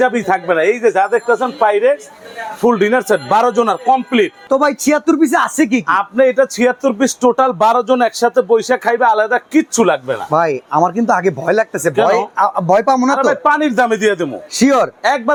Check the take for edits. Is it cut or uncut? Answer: uncut